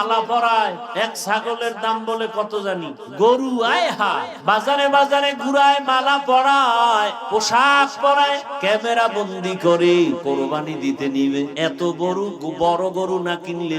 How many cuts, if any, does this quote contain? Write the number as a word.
seven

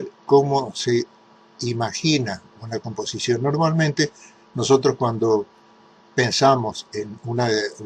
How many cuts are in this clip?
one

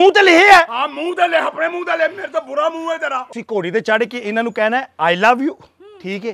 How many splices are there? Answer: one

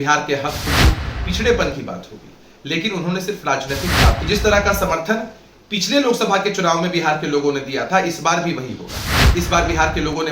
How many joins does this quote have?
one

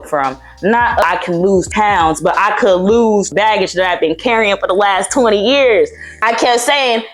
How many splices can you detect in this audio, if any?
two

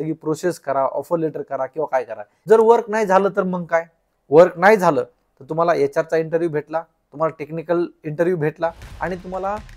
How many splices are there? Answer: one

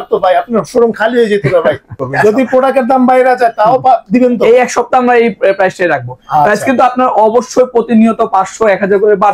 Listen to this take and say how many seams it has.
one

